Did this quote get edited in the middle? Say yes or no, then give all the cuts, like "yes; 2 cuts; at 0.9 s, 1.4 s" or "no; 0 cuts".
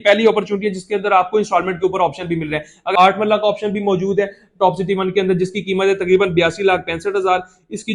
yes; 1 cut; at 2.9 s